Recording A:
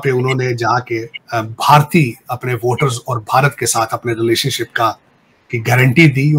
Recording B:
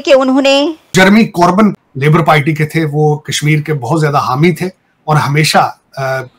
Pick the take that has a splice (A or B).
B